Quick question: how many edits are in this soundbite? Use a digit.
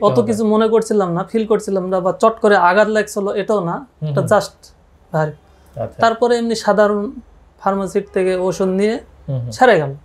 0